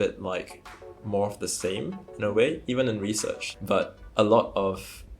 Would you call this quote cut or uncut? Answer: cut